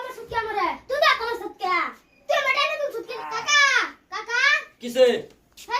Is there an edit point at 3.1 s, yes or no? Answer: yes